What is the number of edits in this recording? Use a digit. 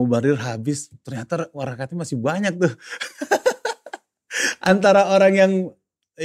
0